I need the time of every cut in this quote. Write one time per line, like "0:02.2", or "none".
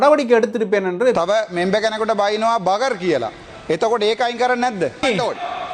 0:01.2
0:05.0